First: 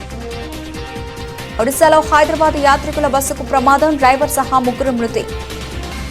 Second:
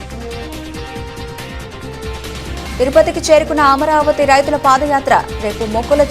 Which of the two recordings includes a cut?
second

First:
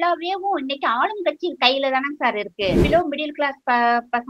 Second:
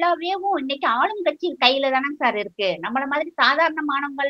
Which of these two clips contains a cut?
first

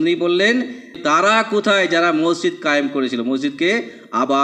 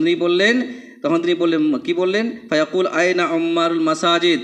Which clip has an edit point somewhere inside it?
first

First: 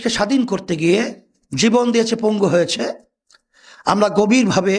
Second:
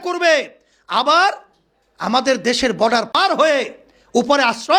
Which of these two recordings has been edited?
second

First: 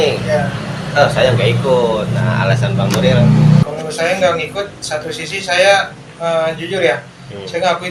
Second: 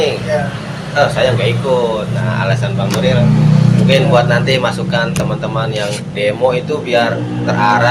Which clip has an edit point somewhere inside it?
first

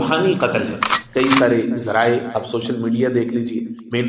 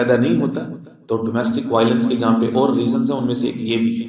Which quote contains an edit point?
first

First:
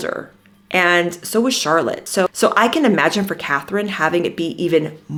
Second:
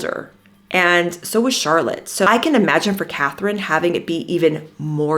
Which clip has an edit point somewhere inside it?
second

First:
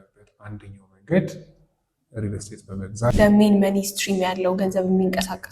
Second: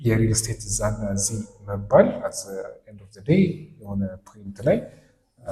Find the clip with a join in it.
first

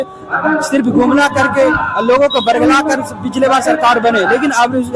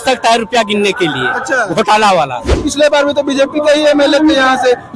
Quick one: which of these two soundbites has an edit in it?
second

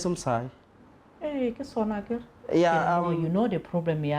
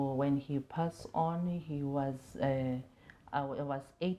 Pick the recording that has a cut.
first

